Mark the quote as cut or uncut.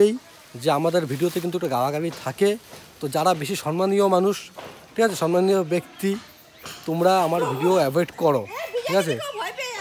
uncut